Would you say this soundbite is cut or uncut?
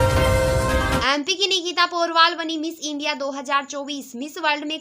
cut